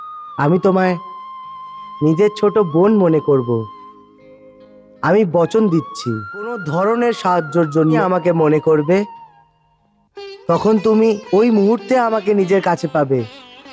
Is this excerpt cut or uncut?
cut